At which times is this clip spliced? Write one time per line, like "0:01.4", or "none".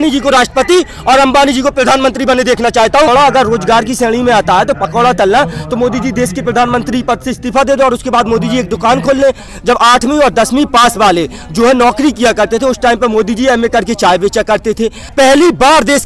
0:03.1
0:09.5
0:15.0

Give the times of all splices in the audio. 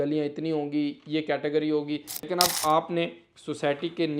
0:02.3

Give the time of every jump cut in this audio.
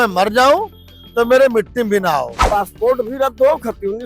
0:02.4

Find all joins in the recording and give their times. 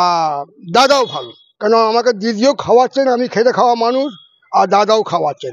none

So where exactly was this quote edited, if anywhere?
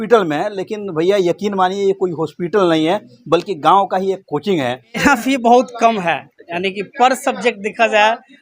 0:05.0

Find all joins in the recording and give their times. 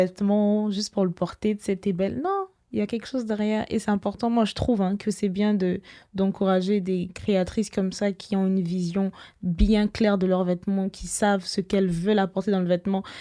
none

